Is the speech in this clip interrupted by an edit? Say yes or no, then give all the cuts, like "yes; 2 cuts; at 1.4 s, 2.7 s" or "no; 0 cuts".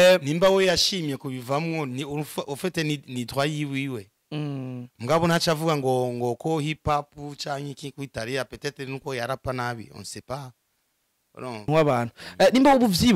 yes; 1 cut; at 11.7 s